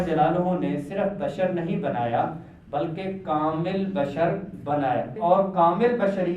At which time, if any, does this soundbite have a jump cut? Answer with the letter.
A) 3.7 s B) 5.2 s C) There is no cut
B